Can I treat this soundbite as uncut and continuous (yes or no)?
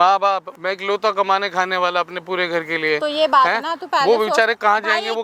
yes